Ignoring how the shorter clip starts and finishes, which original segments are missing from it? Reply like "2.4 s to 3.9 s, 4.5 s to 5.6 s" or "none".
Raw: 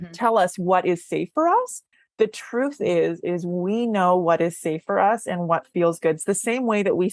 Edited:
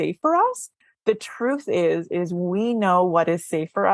none

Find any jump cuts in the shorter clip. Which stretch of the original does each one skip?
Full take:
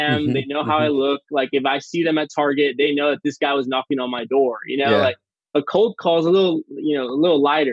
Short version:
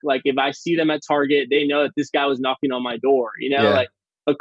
none

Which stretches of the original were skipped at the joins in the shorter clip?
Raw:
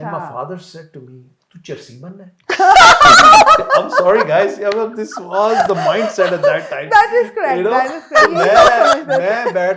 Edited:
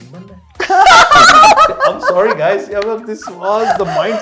none

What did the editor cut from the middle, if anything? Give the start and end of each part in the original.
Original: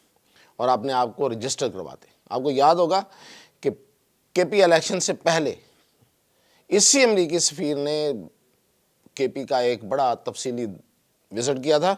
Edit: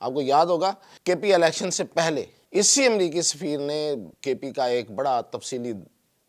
3.2 s to 4.2 s, 5.6 s to 6.5 s, 8.3 s to 9.0 s

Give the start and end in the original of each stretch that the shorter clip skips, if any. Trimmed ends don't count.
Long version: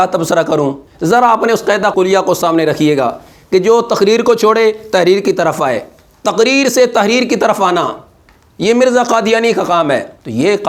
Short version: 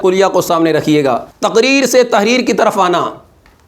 3.2 s to 6.1 s

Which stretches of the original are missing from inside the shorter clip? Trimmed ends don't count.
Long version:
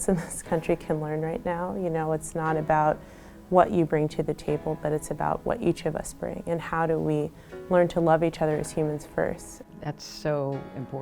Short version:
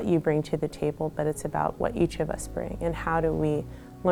none

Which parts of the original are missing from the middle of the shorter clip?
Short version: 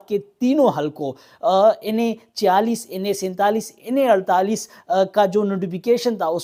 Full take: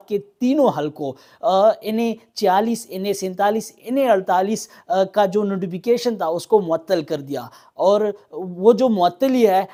none

